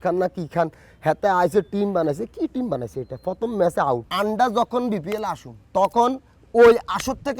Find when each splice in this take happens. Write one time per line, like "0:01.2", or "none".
0:04.1